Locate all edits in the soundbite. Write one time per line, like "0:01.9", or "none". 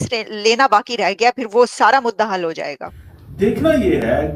0:03.4